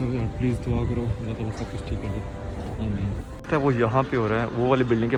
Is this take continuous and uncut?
yes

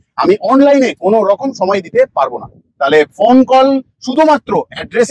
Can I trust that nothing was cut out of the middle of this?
yes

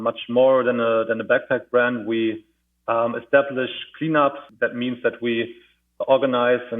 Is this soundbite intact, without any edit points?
no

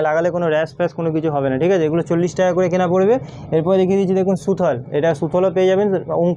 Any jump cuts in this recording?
no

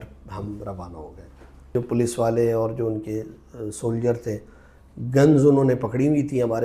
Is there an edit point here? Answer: yes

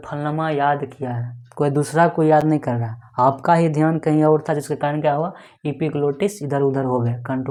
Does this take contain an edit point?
no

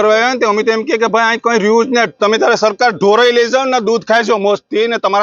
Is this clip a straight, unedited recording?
yes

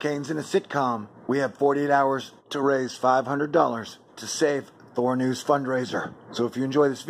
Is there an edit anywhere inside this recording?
no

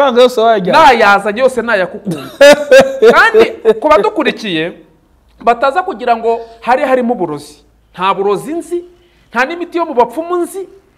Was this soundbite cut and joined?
no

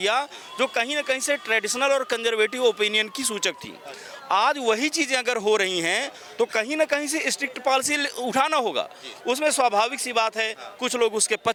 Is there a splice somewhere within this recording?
no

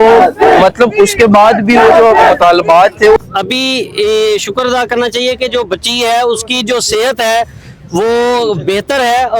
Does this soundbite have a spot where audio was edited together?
yes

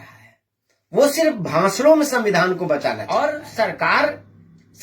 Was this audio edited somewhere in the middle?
yes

